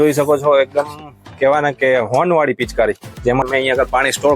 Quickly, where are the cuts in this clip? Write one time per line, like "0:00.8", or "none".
0:03.4